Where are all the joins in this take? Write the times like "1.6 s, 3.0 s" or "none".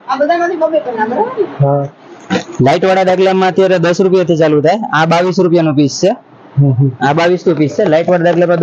none